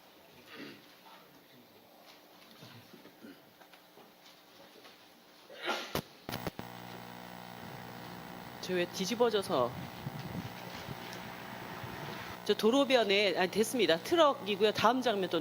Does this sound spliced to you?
yes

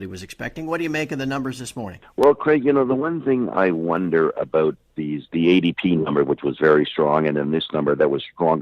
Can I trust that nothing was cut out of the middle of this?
no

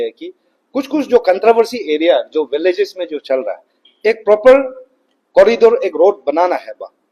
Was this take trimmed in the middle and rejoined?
no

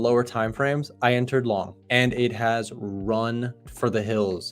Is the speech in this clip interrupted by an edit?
yes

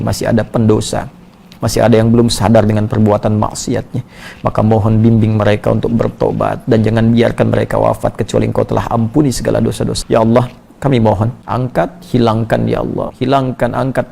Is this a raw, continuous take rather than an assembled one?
no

